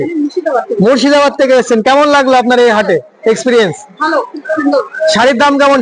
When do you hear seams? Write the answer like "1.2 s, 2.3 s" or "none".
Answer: none